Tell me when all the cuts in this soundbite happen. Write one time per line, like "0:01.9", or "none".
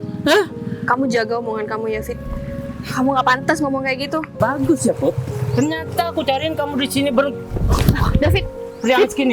0:04.4